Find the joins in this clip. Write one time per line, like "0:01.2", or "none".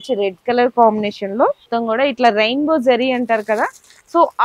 0:01.7